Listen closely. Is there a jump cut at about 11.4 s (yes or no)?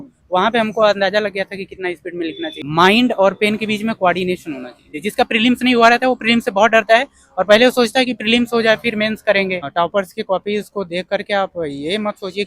no